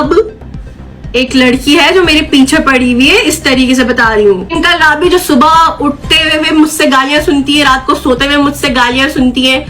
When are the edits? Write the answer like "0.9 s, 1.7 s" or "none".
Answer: 0.9 s, 4.5 s